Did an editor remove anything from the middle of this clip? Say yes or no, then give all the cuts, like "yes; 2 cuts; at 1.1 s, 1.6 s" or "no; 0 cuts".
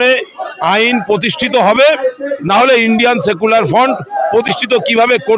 no; 0 cuts